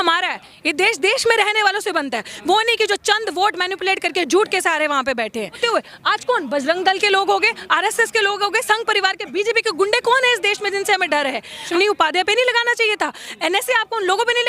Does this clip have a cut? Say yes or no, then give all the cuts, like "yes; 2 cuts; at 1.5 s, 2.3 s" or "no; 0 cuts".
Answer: yes; 2 cuts; at 5.6 s, 11.7 s